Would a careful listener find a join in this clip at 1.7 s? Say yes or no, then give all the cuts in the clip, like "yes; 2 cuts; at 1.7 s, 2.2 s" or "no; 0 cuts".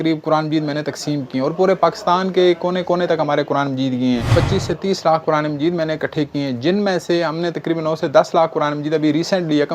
no; 1 cut; at 4.3 s